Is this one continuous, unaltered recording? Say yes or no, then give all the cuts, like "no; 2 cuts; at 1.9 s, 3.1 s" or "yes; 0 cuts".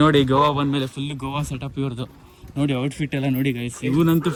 yes; 0 cuts